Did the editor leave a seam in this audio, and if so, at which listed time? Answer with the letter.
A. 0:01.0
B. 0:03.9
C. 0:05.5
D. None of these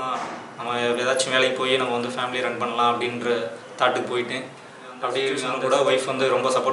C